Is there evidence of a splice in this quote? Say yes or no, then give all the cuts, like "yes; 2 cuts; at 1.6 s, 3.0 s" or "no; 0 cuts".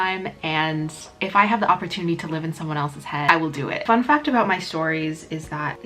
yes; 1 cut; at 3.8 s